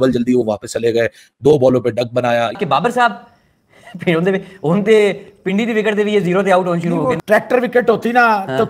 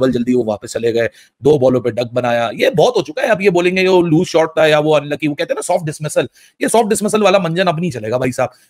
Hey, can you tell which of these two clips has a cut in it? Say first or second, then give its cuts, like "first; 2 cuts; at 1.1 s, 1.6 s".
first; 1 cut; at 2.5 s